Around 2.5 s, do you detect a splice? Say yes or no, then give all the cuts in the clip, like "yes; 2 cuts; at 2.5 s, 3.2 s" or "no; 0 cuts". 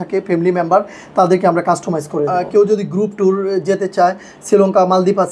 yes; 1 cut; at 2.5 s